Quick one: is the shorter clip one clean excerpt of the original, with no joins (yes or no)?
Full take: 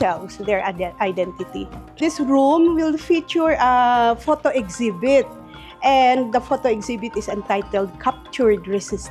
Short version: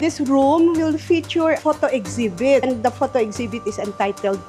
no